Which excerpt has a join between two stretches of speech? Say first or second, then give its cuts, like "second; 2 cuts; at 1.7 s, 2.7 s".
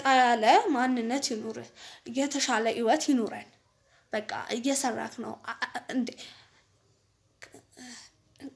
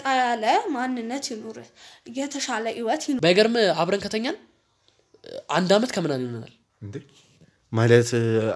second; 1 cut; at 3.2 s